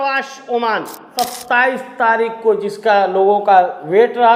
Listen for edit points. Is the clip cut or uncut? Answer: cut